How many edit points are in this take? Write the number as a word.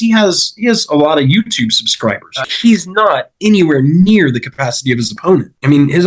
one